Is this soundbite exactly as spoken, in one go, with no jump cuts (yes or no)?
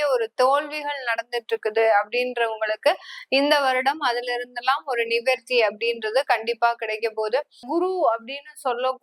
no